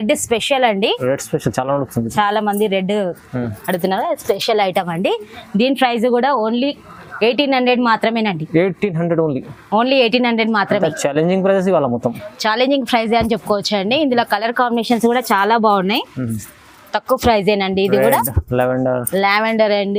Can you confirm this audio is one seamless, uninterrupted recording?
yes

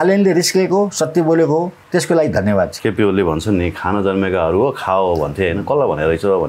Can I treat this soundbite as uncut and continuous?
no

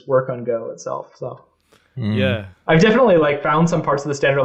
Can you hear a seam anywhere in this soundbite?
no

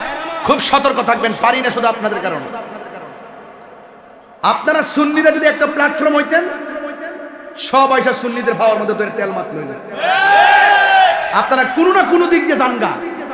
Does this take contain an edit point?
no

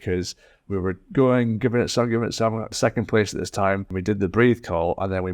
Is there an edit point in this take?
yes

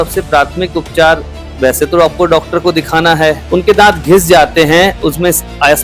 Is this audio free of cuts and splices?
no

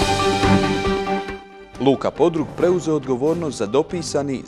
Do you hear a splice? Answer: no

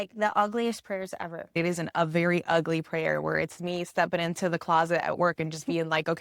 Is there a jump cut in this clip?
yes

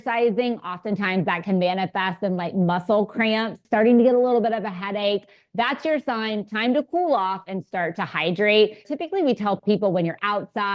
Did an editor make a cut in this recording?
yes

